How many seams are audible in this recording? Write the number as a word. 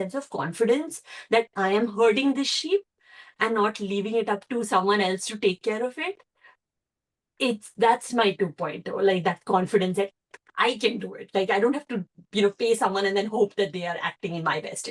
zero